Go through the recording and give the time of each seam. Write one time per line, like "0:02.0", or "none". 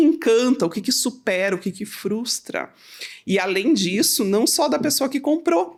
none